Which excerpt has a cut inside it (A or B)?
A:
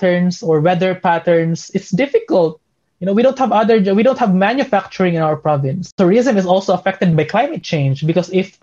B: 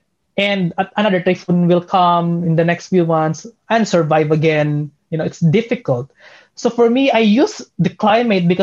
A